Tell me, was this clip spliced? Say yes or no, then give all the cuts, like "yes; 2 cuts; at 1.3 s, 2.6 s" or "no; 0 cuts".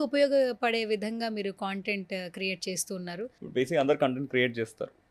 yes; 1 cut; at 3.3 s